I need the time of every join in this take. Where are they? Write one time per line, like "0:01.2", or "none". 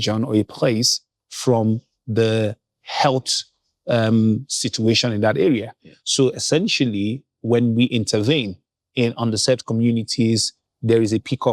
none